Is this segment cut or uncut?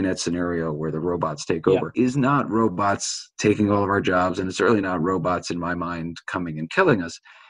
cut